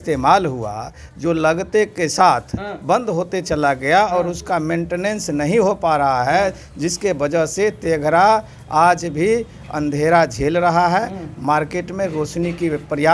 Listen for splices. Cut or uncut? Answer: uncut